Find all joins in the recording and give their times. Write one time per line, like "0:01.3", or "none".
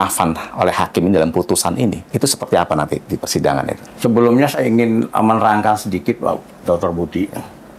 none